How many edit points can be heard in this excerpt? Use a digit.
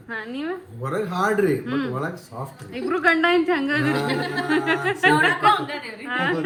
0